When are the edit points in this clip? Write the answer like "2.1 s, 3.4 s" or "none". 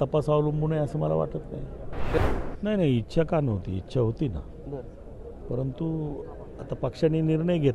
2.2 s